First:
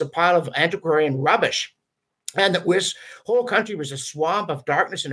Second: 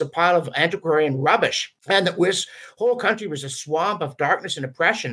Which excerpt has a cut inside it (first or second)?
second